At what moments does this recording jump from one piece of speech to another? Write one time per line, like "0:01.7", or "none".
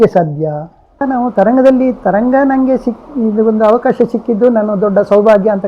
0:01.0